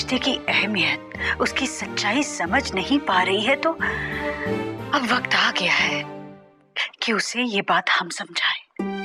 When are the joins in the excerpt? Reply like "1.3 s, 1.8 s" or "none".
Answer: none